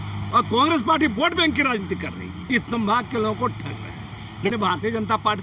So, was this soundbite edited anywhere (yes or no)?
yes